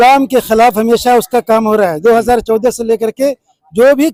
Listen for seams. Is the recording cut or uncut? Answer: uncut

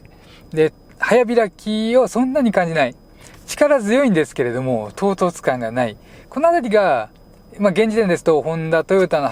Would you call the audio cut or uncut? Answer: uncut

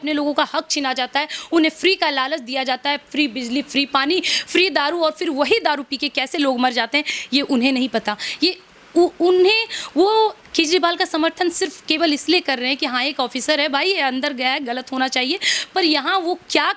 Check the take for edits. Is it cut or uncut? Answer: uncut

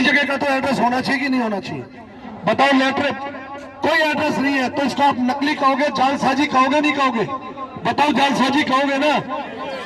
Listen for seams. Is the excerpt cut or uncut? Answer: uncut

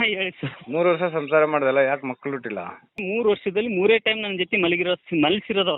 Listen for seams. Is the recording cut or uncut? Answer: cut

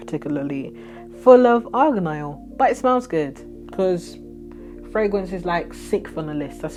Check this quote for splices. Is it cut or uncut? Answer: uncut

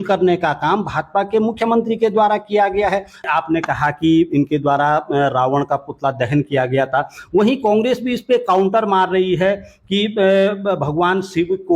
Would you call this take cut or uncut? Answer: cut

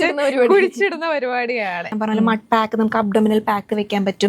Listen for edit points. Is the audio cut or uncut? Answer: cut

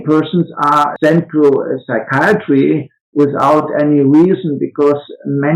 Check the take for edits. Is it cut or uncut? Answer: cut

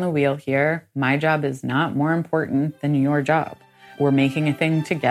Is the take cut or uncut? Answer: cut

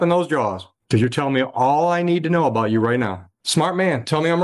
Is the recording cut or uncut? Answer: cut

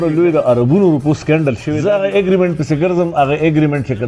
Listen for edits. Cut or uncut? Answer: cut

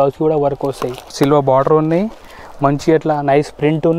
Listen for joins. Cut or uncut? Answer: cut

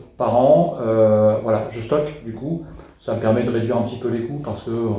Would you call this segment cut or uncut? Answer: uncut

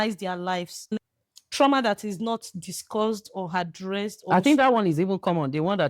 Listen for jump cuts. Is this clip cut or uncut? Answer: cut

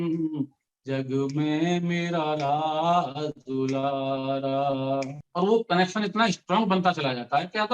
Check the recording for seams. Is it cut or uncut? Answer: cut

